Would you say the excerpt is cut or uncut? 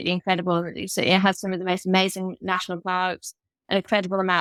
uncut